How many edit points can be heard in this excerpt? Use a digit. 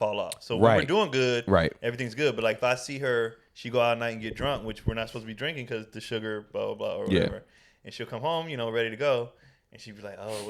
0